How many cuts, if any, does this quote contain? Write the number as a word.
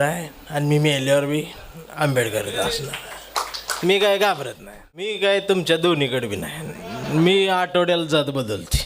one